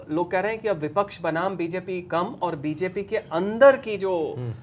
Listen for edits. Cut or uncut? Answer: uncut